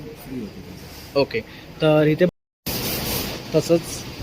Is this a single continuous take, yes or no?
no